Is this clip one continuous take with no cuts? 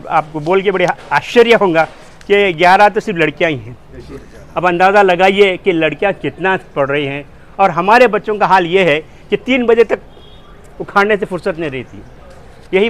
yes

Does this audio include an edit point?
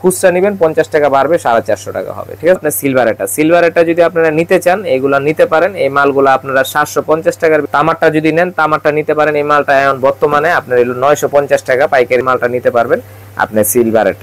yes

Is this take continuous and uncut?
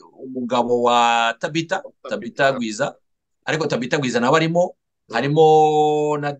yes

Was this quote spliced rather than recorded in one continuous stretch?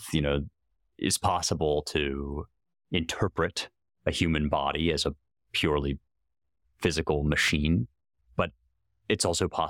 no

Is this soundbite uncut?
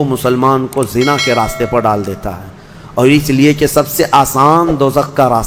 yes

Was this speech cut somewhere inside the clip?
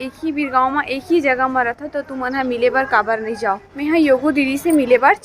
yes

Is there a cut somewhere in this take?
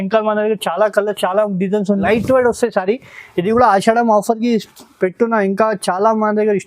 yes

